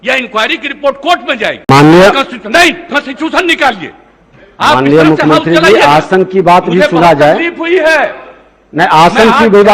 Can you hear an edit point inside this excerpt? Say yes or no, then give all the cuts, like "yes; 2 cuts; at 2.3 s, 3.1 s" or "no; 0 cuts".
yes; 1 cut; at 1.7 s